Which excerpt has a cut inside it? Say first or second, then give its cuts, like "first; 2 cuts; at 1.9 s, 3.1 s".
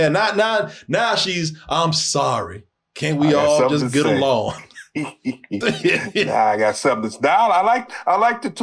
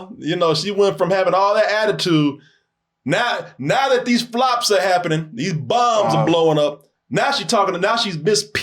second; 1 cut; at 6.9 s